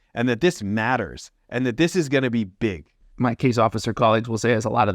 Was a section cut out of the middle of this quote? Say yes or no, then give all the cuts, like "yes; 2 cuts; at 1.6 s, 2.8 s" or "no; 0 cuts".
yes; 1 cut; at 3.0 s